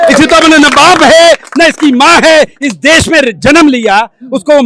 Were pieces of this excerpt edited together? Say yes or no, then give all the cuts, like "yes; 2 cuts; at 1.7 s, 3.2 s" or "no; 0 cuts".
no; 0 cuts